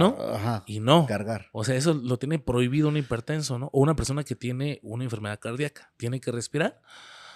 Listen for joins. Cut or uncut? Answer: uncut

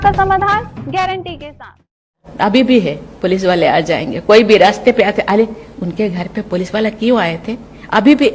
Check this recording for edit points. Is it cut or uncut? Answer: cut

